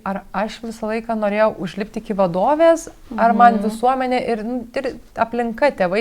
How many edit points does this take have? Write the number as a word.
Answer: zero